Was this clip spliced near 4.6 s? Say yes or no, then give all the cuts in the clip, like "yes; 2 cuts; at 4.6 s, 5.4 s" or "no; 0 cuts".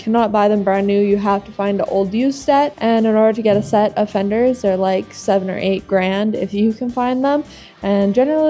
no; 1 cut; at 2.8 s